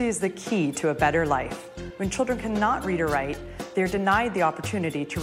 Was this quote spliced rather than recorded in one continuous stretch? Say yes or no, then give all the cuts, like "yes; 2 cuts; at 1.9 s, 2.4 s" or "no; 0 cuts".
no; 0 cuts